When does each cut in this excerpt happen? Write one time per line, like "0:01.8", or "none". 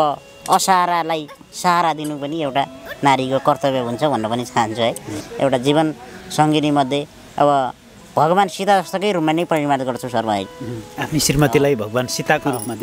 0:05.2